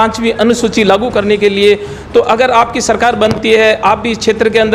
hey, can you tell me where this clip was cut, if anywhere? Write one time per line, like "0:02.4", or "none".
none